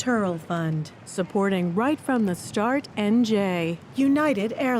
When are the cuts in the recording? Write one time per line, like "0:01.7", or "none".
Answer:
0:03.8